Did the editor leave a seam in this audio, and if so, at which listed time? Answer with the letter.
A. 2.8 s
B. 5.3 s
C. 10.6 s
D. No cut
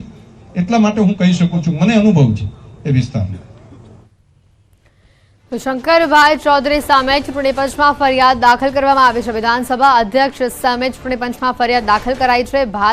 B